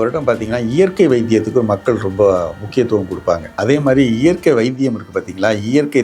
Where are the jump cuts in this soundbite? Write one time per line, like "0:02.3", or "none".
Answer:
0:03.5